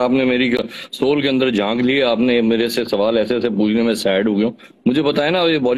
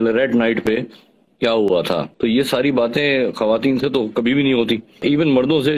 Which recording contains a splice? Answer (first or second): second